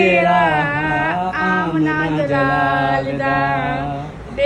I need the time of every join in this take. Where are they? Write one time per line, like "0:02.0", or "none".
none